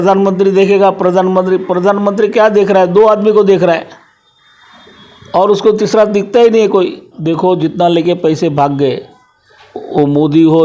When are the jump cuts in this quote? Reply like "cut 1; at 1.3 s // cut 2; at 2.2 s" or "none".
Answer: cut 1; at 7.2 s